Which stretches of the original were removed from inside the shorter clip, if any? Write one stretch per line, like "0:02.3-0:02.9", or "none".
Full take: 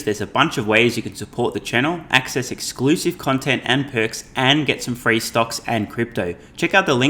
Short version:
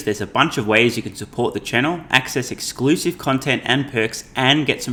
none

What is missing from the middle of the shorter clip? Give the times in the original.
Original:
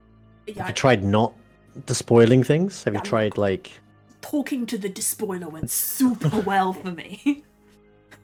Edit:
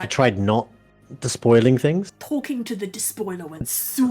0:02.8-0:04.1

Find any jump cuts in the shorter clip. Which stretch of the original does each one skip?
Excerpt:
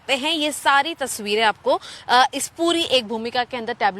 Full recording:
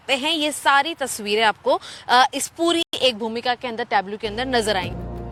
0:02.9-0:03.0

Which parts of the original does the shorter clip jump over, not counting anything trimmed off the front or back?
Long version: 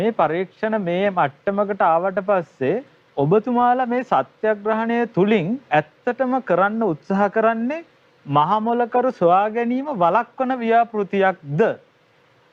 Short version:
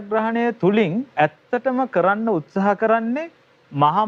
none

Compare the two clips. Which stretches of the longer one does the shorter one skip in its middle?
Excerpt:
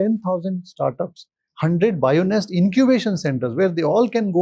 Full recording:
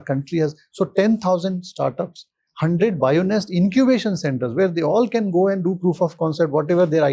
none

